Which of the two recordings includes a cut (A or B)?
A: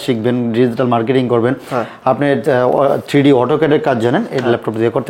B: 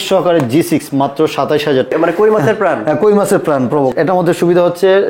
B